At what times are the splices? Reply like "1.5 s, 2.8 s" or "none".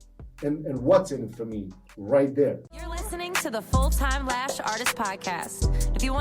3.1 s